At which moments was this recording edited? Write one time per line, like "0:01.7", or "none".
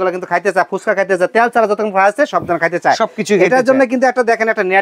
none